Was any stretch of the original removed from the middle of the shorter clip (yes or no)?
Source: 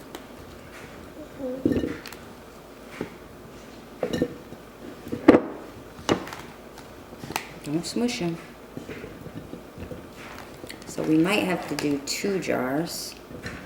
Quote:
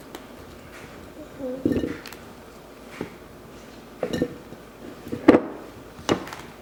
no